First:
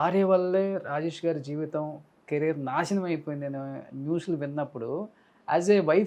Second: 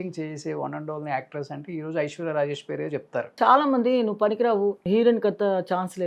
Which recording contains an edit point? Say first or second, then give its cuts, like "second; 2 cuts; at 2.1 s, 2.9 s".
second; 2 cuts; at 3.3 s, 4.8 s